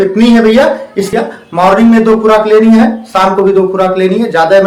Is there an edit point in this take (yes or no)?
yes